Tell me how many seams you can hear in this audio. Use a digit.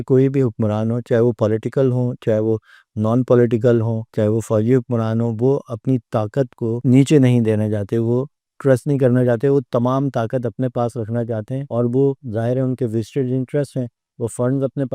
1